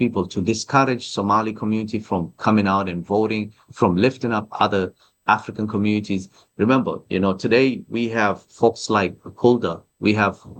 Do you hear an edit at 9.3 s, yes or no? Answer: no